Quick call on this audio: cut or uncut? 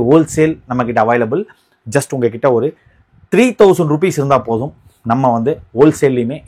uncut